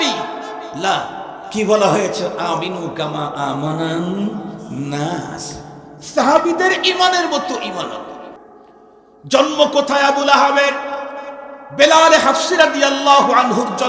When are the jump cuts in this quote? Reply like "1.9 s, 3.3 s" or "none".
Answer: 8.4 s